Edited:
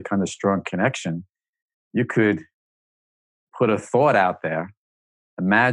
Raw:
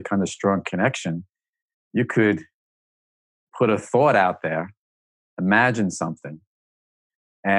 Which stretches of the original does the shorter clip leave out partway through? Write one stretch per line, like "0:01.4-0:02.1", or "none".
none